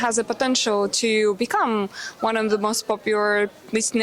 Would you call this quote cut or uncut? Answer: uncut